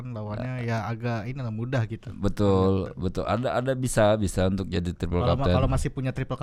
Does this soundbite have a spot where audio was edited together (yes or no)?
no